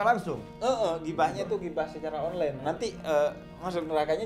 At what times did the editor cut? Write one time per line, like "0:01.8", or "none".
0:02.6